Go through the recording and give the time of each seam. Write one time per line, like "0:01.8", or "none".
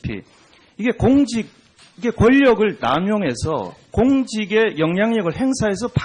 0:03.2